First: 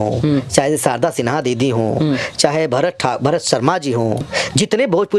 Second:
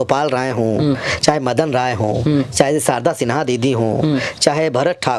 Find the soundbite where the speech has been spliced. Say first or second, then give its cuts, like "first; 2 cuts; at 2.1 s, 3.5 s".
first; 1 cut; at 4.2 s